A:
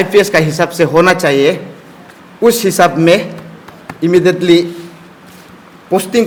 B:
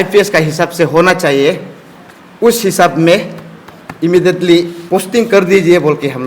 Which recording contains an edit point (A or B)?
B